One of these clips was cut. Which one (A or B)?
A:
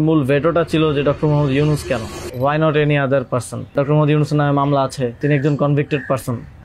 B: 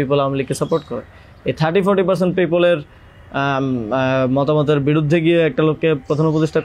A